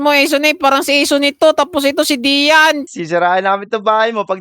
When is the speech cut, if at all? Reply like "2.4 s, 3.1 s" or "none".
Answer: 2.9 s